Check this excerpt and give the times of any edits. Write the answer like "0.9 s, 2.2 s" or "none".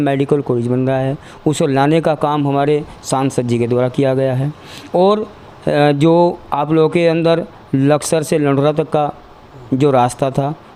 none